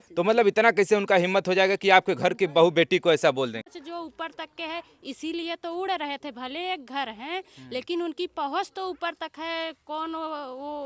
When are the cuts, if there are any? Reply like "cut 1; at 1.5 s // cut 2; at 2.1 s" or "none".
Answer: cut 1; at 3.7 s